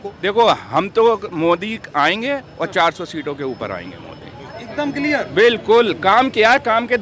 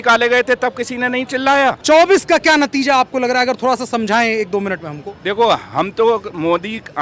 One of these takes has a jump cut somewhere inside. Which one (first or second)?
second